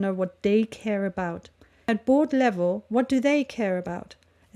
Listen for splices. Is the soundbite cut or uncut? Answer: cut